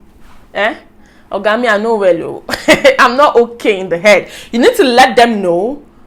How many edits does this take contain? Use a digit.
0